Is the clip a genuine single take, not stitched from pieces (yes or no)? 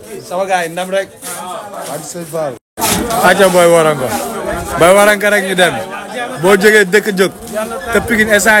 yes